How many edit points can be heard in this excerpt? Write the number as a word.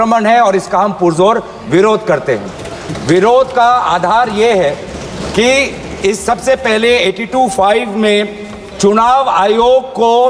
zero